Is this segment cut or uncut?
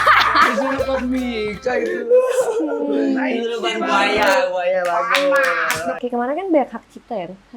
cut